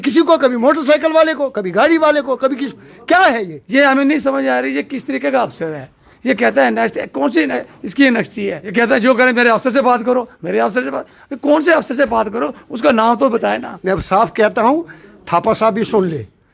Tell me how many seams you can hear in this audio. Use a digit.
3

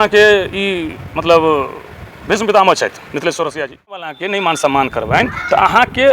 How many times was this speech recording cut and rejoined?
1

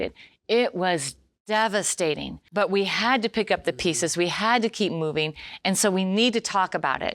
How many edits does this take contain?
1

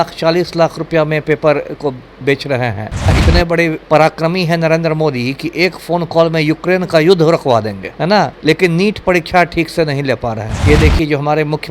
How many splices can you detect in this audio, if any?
2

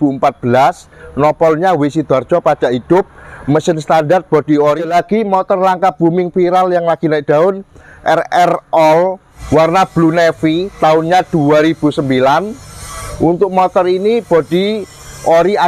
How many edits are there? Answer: 2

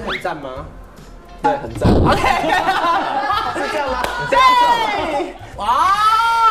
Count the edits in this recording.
0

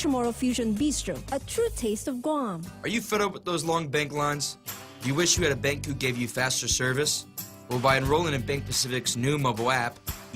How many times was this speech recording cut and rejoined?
1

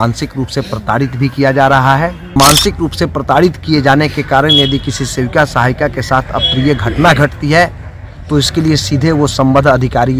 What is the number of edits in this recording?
1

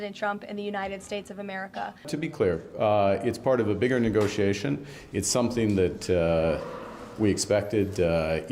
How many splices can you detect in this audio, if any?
1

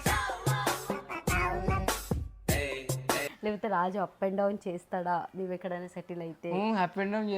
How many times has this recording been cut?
1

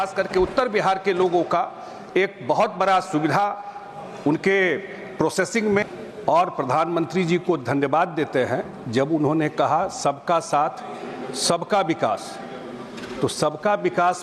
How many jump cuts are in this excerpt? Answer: 1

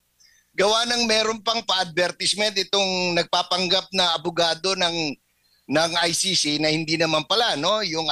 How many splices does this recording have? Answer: 0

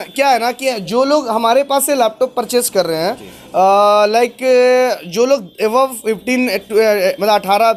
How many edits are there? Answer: 0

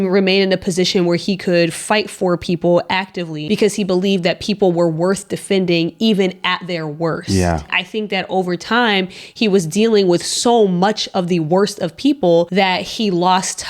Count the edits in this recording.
3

